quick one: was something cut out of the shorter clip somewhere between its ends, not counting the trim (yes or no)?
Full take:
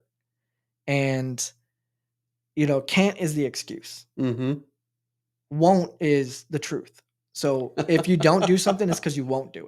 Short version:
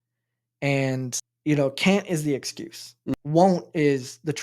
yes